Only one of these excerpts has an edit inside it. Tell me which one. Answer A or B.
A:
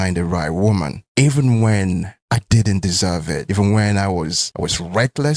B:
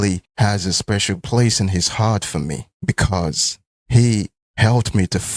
A